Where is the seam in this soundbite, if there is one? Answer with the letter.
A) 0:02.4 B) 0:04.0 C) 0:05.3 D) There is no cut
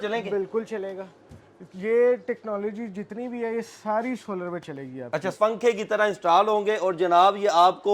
C